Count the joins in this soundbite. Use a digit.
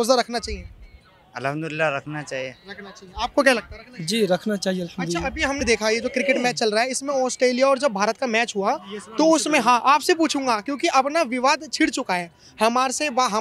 0